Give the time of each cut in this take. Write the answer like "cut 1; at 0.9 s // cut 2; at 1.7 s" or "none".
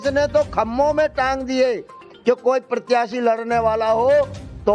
none